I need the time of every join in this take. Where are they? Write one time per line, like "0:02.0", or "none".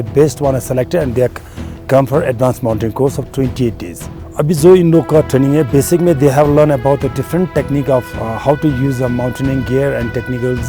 0:04.3